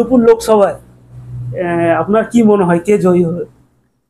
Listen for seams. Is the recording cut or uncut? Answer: uncut